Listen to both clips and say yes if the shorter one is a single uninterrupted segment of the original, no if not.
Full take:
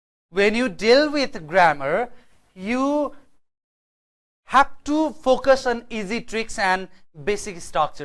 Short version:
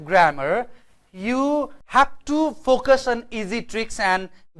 no